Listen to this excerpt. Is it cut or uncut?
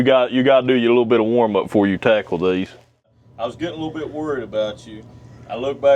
cut